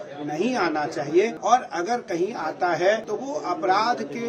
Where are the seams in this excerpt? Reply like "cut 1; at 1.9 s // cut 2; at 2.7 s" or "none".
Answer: cut 1; at 1.4 s // cut 2; at 3.1 s